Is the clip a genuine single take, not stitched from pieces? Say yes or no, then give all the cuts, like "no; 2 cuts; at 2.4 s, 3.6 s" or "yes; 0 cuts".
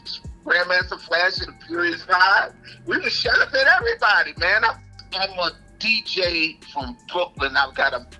no; 1 cut; at 5.0 s